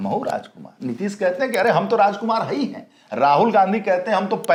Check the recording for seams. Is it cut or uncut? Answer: uncut